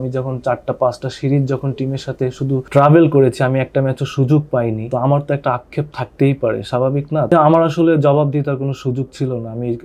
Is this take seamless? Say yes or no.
no